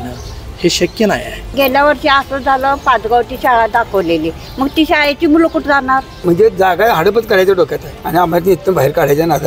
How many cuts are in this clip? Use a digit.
3